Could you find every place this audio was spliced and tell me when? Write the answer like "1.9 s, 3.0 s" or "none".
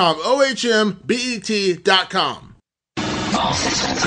2.9 s